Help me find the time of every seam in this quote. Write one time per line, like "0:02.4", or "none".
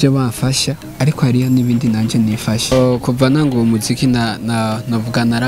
0:02.7